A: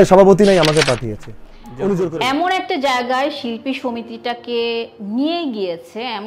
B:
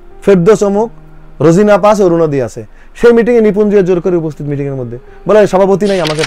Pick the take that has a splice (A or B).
A